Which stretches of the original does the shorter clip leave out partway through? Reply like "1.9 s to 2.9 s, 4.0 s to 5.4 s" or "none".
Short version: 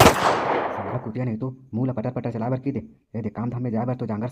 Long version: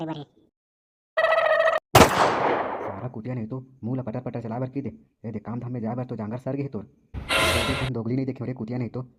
2.9 s to 3.0 s